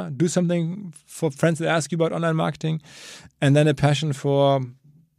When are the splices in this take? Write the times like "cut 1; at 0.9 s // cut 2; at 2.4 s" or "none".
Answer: none